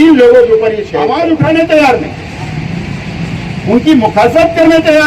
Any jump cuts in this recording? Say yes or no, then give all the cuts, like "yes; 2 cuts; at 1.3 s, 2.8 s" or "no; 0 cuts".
yes; 1 cut; at 1.1 s